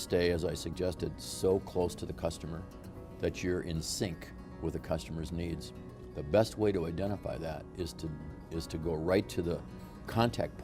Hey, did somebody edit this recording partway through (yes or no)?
no